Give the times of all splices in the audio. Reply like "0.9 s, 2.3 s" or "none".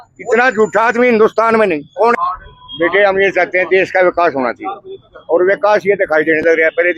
2.2 s